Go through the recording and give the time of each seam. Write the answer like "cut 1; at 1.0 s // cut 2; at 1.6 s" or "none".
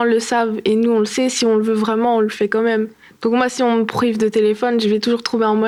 none